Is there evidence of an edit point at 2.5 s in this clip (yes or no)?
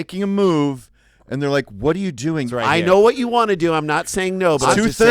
yes